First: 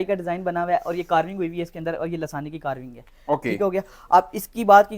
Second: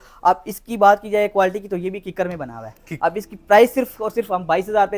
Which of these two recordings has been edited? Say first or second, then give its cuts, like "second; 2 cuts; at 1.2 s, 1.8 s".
second; 1 cut; at 2.9 s